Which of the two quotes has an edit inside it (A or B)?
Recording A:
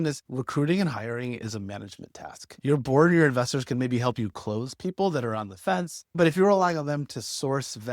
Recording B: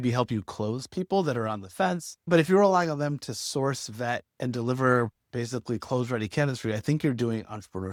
A